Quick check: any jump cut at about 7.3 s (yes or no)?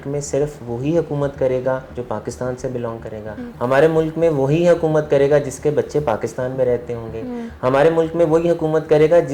no